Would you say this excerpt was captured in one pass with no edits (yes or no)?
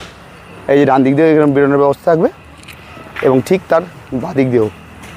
yes